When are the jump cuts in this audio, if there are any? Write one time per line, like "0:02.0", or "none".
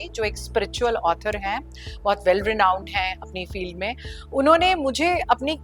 none

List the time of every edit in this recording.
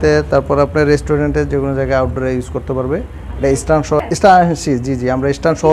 0:04.0

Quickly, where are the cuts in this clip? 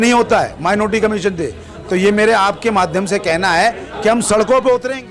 none

